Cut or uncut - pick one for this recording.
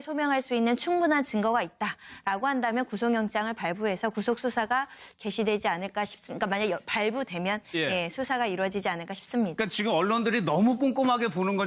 cut